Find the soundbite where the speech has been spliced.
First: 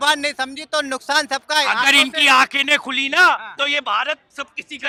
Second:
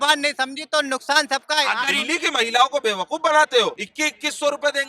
second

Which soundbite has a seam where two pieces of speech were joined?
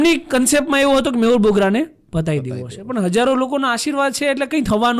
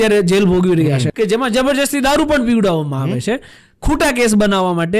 second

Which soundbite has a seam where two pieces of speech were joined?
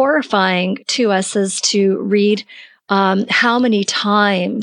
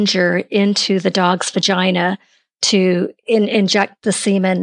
second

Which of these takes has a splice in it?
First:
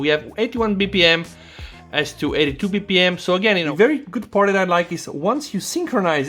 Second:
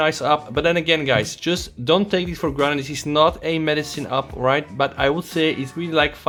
first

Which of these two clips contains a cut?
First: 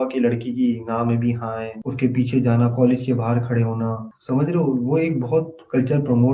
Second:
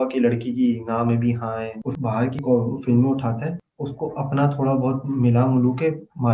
second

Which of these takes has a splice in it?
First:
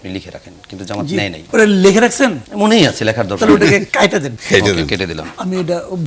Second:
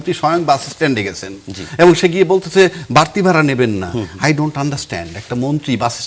first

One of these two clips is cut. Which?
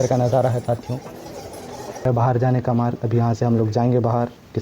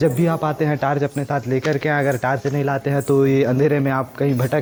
first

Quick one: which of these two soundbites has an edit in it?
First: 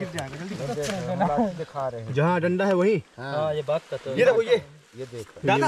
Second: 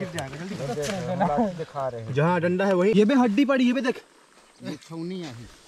second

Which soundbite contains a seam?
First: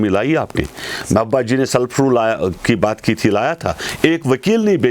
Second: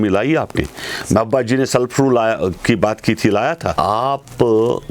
second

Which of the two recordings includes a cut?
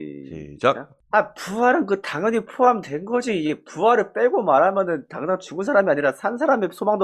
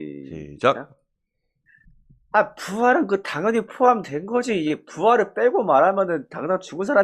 first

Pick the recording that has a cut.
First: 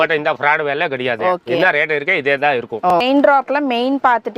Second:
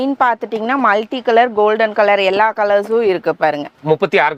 first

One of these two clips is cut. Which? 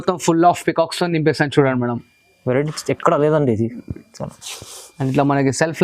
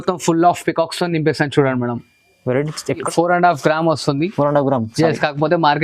second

